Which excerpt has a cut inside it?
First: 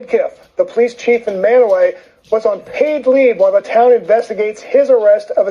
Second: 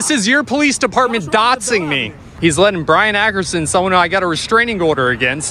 second; 1 cut; at 2.2 s

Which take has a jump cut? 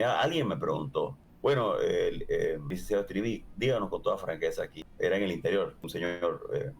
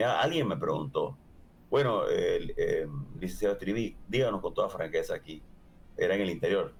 first; 4 cuts; at 1.2 s, 2.7 s, 4.8 s, 5.8 s

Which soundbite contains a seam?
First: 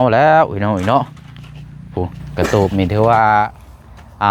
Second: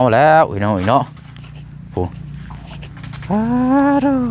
first; 1 cut; at 2.2 s

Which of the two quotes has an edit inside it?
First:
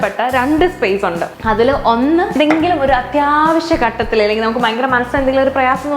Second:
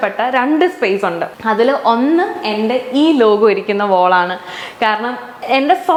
first; 1 cut; at 2.3 s

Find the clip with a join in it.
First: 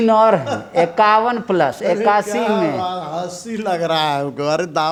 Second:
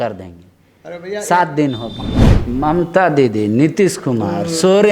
second; 1 cut; at 2.3 s

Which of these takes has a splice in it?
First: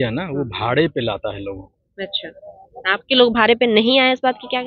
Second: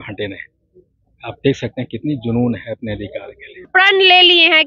second; 1 cut; at 3.7 s

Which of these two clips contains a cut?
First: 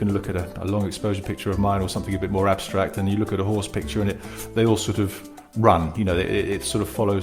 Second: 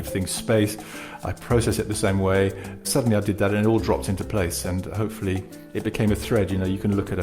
second; 2 cuts; at 2.9 s, 5.6 s

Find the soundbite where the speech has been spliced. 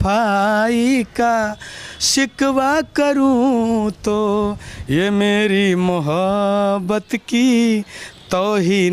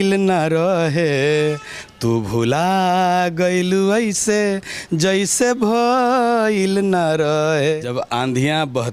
second; 1 cut; at 7.9 s

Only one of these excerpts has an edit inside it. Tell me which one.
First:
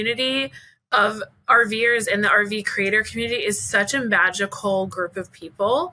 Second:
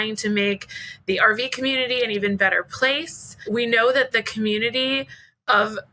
second; 1 cut; at 3.4 s

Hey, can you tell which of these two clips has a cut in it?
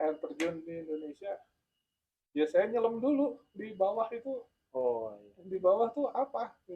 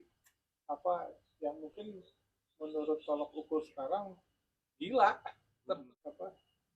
second; 1 cut; at 5.8 s

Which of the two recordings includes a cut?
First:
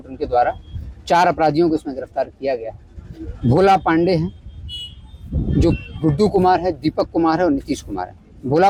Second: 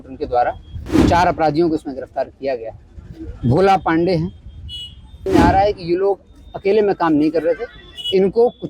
second; 1 cut; at 5.3 s

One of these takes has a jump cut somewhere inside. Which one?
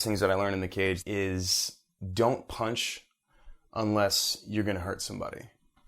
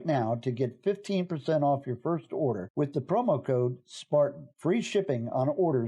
first; 1 cut; at 1.0 s

